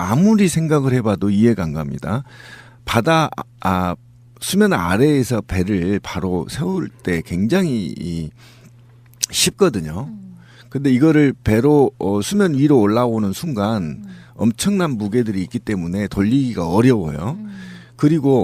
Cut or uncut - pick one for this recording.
uncut